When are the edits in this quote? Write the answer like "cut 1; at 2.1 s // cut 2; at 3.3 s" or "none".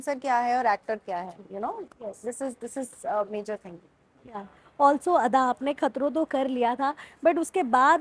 none